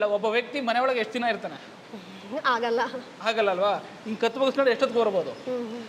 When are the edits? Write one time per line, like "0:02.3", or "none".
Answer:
none